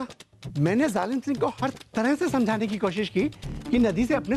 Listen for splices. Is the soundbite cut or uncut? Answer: uncut